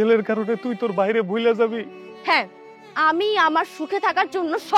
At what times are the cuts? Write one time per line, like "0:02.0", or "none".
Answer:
none